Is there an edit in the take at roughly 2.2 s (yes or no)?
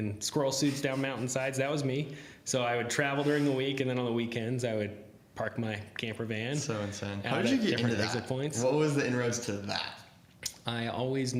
no